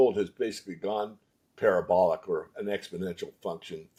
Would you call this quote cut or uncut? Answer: uncut